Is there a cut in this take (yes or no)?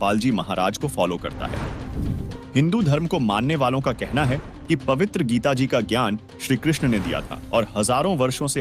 yes